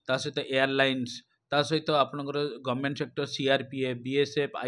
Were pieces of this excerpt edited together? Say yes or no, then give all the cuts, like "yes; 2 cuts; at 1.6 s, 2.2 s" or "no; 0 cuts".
no; 0 cuts